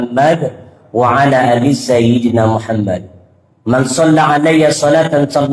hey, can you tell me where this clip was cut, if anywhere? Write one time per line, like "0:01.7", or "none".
none